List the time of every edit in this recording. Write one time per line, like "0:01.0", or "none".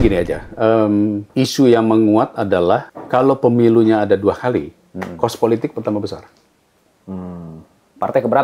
0:01.2
0:03.0

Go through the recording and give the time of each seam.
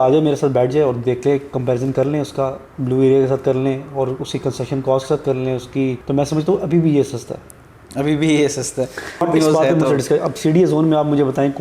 0:06.0
0:09.2

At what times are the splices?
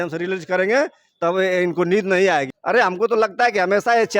0:02.5

